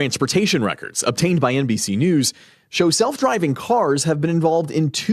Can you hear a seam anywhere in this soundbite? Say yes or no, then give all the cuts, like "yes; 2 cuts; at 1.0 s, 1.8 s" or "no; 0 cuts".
no; 0 cuts